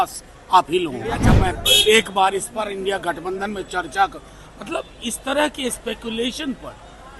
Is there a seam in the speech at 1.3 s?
yes; 1 cut; at 1.3 s

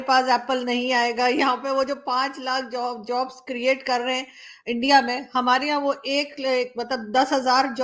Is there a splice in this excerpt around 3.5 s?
no; 0 cuts

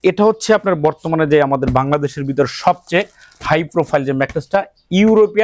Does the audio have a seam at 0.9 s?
no; 0 cuts

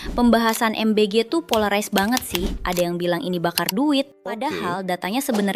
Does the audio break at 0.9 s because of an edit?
no; 2 cuts; at 2.6 s, 4.4 s

